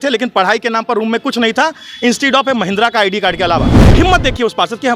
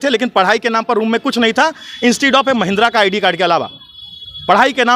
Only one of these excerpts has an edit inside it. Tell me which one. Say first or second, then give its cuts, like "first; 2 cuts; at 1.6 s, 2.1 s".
first; 1 cut; at 3.8 s